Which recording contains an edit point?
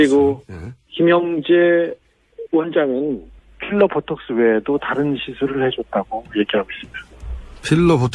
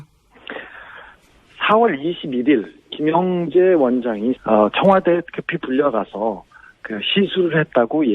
first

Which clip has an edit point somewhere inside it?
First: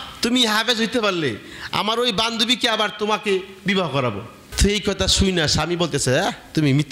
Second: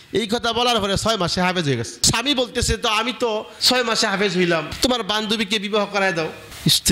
second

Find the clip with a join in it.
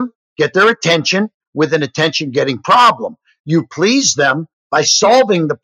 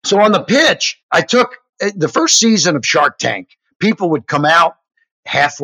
second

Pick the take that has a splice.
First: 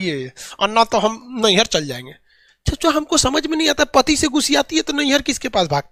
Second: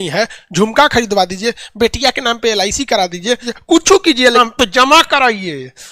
second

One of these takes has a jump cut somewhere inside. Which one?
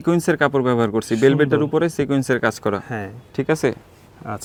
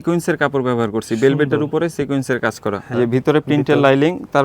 second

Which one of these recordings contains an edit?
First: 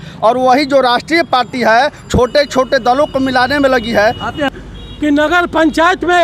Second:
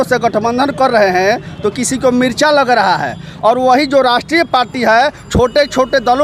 first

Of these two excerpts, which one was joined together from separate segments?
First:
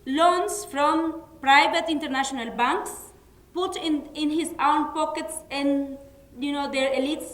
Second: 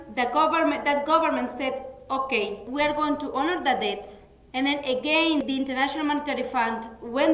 second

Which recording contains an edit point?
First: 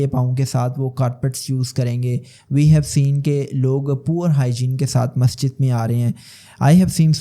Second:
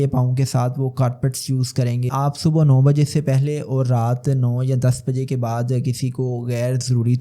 second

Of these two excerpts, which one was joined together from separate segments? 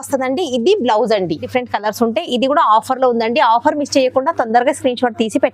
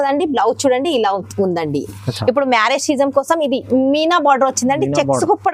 first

